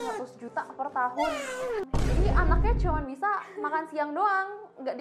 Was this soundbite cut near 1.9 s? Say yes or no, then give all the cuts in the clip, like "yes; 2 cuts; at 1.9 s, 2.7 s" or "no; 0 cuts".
yes; 1 cut; at 1.9 s